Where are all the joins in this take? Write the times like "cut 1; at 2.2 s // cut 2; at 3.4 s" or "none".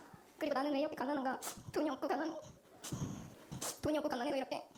none

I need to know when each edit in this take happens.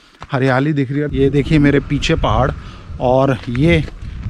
cut 1; at 1.1 s

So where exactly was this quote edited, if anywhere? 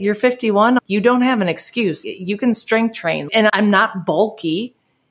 cut 1; at 0.8 s // cut 2; at 2.0 s // cut 3; at 3.4 s

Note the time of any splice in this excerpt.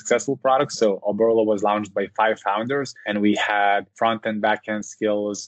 cut 1; at 3.0 s // cut 2; at 3.9 s

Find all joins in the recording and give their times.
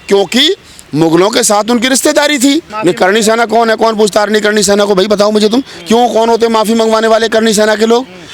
cut 1; at 2.7 s

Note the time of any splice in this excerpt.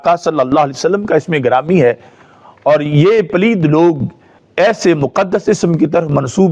none

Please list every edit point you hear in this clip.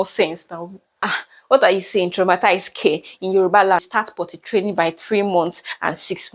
cut 1; at 1.1 s // cut 2; at 3.9 s

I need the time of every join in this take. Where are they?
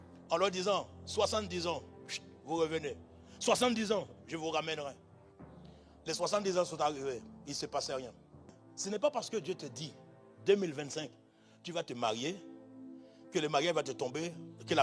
cut 1; at 8.7 s

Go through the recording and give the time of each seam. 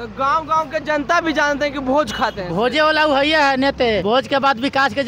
cut 1; at 4.0 s

